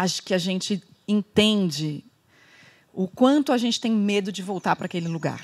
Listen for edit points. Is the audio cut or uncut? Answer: uncut